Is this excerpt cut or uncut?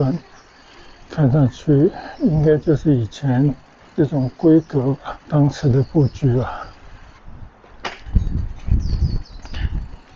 uncut